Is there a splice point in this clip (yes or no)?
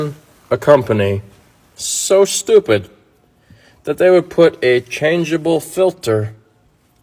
no